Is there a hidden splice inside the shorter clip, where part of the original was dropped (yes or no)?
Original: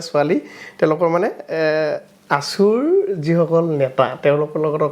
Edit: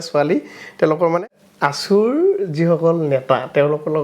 yes